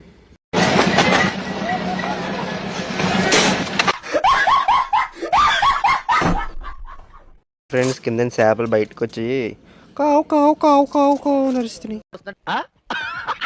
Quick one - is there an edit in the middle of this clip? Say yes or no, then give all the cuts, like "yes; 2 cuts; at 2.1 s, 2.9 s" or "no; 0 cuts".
yes; 1 cut; at 7.7 s